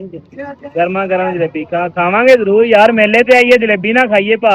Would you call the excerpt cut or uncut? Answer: uncut